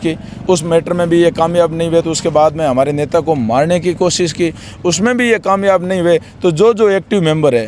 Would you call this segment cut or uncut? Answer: uncut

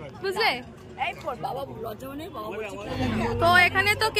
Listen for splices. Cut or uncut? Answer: cut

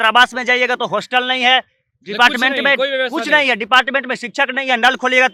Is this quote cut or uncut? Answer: uncut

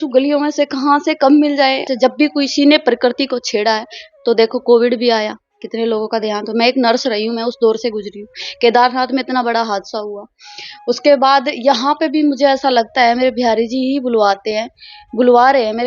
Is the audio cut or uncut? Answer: cut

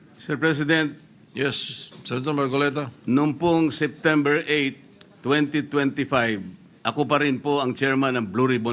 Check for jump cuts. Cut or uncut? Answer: cut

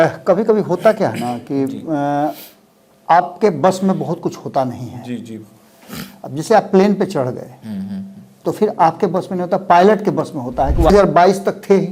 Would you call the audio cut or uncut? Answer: cut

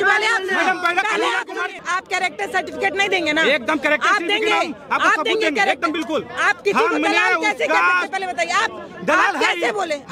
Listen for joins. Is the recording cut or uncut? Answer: cut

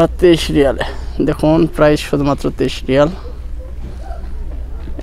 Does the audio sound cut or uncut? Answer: uncut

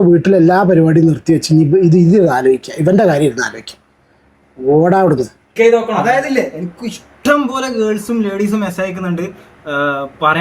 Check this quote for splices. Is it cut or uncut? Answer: cut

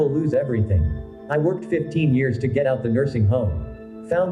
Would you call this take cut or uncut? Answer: uncut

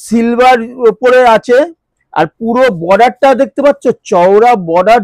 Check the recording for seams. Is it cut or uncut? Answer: uncut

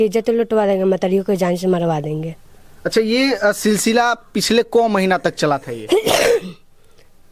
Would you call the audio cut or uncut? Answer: uncut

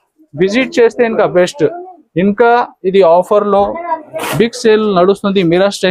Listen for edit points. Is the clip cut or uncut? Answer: uncut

